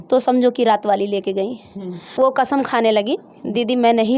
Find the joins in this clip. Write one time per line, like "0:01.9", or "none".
0:02.0